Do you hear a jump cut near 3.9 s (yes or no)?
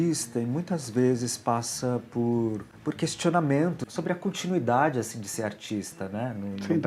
yes